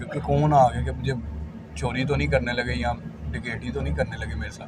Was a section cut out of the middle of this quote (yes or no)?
no